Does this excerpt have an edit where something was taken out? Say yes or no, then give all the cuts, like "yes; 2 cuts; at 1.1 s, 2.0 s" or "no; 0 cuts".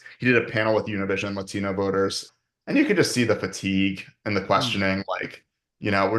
yes; 1 cut; at 2.3 s